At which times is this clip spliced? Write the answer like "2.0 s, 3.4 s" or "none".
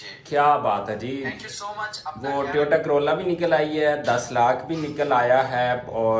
none

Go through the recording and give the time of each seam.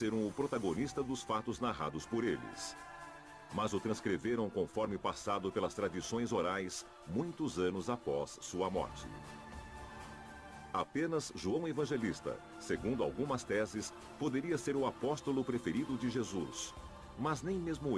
4.2 s

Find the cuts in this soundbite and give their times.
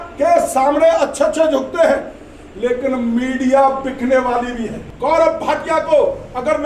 4.9 s

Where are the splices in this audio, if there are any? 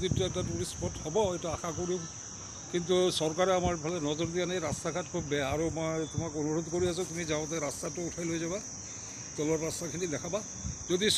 none

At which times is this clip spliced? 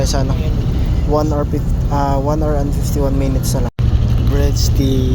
3.7 s

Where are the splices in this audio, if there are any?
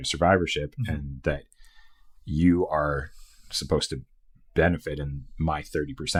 none

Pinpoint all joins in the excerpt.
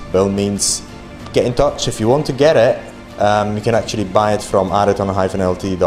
none

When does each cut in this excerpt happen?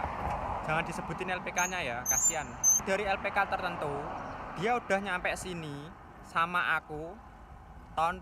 2.8 s

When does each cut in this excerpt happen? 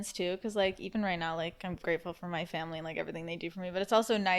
none

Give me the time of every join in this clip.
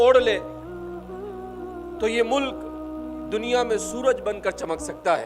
none

